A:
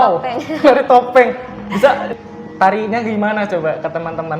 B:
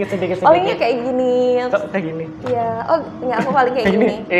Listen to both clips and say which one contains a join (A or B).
A